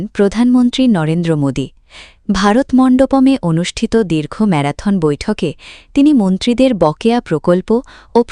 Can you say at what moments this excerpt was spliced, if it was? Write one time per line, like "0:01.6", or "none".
none